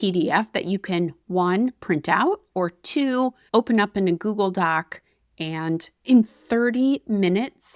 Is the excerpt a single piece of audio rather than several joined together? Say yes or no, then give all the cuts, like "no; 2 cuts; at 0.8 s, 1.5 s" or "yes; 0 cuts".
no; 1 cut; at 6.0 s